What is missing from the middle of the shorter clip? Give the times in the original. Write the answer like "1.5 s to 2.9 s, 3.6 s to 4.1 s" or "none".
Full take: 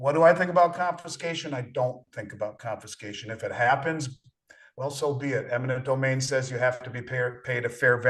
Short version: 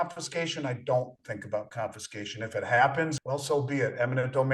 4.1 s to 4.7 s